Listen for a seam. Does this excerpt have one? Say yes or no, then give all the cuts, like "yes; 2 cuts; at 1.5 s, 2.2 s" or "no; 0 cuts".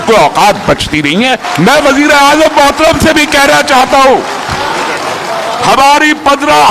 yes; 1 cut; at 1.5 s